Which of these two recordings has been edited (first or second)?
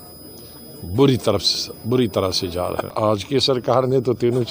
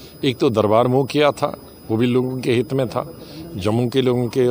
first